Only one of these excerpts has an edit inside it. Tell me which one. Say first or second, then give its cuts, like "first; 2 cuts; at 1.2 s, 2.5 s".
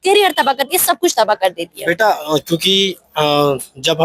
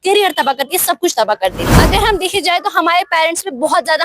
second; 1 cut; at 1.7 s